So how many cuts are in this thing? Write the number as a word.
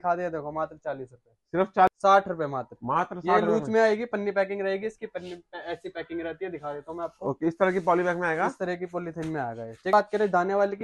two